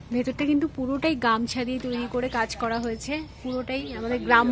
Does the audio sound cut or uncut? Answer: uncut